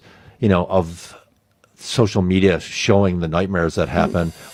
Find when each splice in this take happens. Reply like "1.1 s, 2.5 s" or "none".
none